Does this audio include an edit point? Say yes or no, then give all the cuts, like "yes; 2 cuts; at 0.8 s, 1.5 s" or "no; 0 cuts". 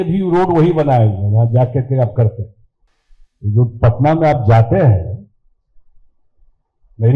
no; 0 cuts